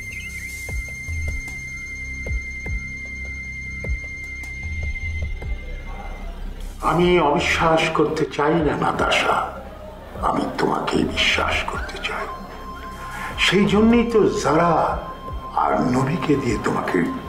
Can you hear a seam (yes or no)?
no